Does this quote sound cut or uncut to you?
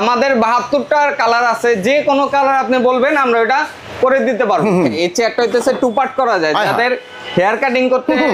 cut